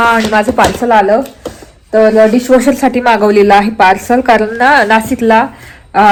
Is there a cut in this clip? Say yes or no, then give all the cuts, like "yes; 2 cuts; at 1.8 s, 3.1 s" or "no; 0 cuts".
no; 0 cuts